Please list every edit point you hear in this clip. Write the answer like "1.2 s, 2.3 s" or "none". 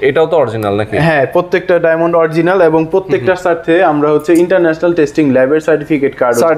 none